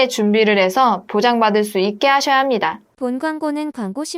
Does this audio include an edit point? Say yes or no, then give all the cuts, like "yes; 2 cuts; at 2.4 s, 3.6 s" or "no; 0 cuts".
yes; 1 cut; at 2.9 s